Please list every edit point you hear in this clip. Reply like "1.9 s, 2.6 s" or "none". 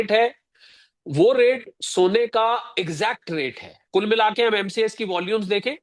3.8 s